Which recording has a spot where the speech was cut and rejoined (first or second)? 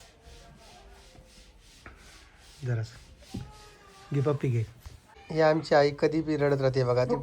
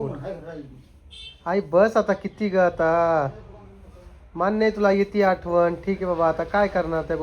first